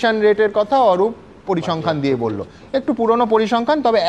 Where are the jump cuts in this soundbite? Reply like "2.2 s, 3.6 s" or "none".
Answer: none